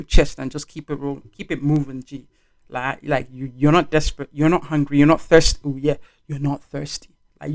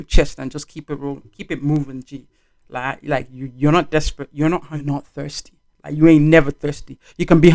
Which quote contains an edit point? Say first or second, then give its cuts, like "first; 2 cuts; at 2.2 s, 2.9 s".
second; 1 cut; at 4.7 s